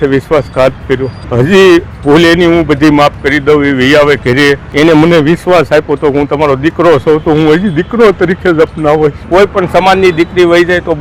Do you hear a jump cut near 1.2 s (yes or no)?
yes